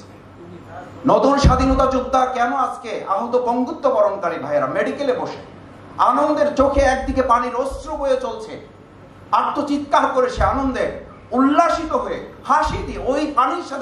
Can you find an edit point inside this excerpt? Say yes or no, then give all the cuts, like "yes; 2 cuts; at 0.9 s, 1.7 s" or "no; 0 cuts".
no; 0 cuts